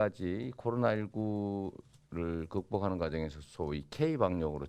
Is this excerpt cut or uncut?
uncut